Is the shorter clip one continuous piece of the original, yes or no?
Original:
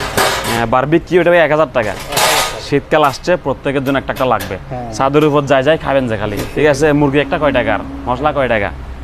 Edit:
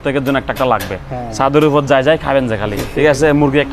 yes